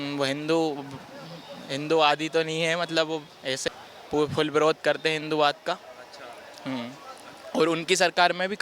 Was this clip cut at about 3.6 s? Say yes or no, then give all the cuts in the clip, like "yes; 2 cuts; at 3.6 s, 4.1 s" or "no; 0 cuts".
yes; 1 cut; at 3.6 s